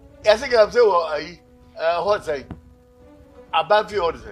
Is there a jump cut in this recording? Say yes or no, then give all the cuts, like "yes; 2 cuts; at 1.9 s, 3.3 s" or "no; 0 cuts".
no; 0 cuts